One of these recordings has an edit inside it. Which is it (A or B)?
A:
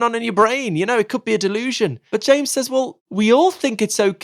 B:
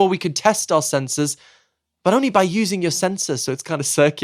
A